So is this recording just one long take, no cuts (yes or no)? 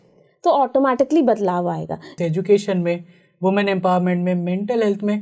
no